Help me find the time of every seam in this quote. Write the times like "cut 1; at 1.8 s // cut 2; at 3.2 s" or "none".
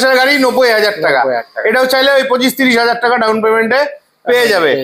none